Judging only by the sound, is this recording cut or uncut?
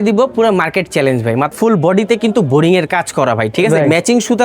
cut